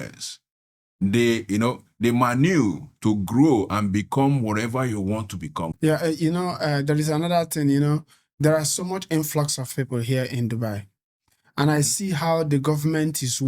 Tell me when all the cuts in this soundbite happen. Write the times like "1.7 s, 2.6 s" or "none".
5.7 s